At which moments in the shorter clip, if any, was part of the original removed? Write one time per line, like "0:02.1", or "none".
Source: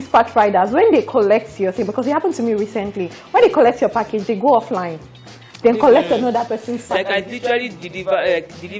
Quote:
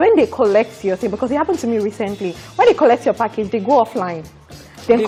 none